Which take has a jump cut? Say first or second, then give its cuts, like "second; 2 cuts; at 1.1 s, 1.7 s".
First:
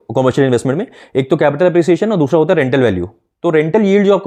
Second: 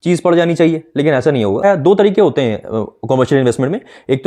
second; 1 cut; at 1.6 s